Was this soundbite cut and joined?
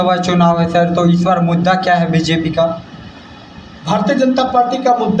no; 0 cuts

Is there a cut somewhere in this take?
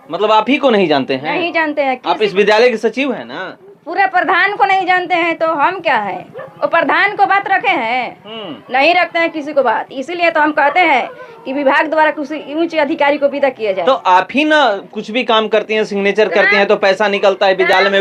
no; 0 cuts

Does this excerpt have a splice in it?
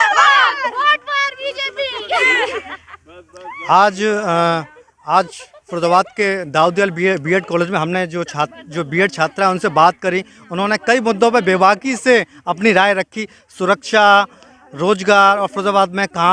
no; 0 cuts

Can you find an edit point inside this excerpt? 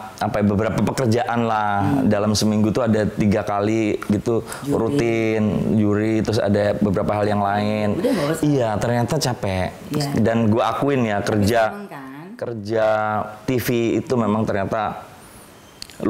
no; 0 cuts

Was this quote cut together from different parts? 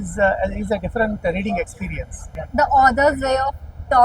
yes; 1 cut; at 2.4 s

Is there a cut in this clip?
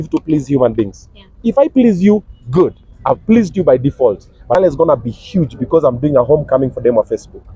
yes; 1 cut; at 4.6 s

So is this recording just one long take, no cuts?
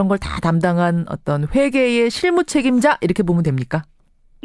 no; 1 cut; at 3.1 s

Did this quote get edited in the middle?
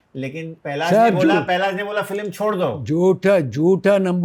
no; 0 cuts

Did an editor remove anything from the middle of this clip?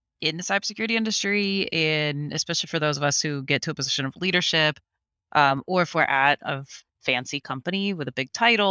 no; 0 cuts

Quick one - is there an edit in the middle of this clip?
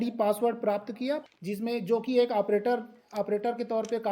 yes; 1 cut; at 1.2 s

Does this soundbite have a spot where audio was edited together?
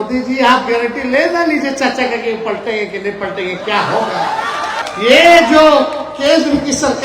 yes; 1 cut; at 4.8 s

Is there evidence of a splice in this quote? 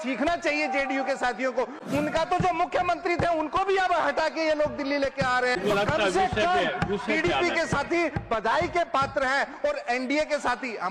yes; 1 cut; at 5.6 s

